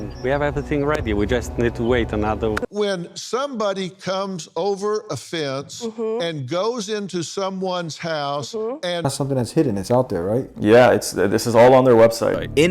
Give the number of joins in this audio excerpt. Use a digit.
2